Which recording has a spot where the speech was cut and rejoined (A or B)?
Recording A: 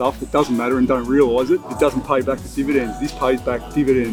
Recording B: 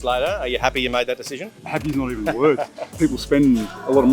B